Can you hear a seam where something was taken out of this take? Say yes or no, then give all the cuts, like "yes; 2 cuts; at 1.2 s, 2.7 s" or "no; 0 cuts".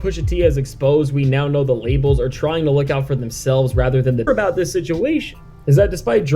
yes; 1 cut; at 4.3 s